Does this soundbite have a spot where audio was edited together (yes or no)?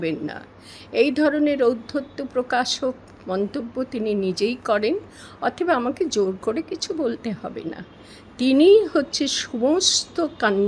no